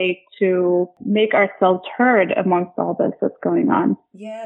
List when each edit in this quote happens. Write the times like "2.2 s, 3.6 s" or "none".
1.0 s